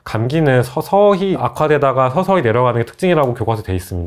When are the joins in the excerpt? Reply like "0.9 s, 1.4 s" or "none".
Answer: 1.4 s